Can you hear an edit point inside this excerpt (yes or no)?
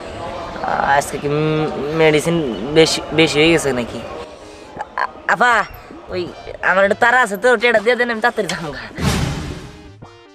no